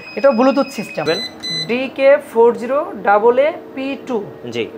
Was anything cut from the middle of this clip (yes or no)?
yes